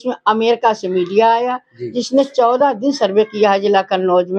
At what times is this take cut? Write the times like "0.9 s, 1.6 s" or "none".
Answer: none